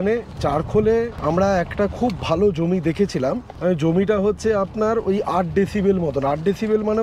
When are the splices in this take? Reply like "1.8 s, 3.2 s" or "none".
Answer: 1.2 s, 3.5 s